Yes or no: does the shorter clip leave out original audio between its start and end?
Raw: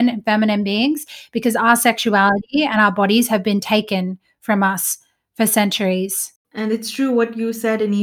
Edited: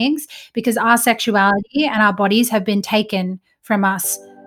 no